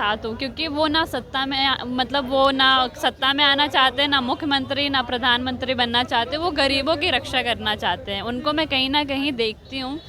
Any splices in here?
no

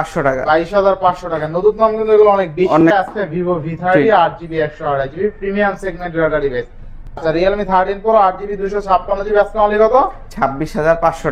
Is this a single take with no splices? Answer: no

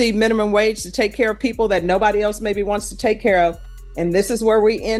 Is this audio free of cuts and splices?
yes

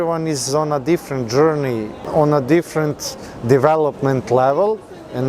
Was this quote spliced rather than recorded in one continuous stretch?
yes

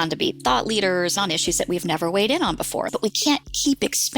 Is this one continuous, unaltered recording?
no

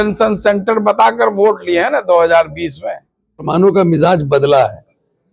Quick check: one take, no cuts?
no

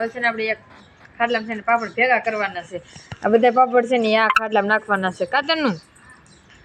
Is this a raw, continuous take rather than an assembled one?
yes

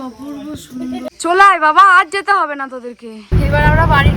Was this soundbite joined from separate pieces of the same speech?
yes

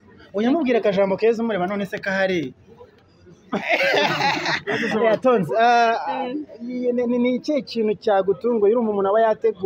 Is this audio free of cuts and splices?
yes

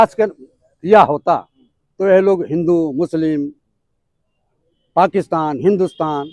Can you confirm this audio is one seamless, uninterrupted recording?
yes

